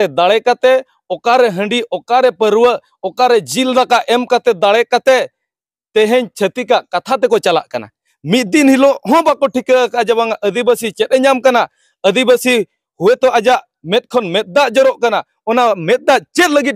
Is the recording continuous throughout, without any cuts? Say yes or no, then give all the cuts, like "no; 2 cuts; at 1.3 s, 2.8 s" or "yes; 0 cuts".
yes; 0 cuts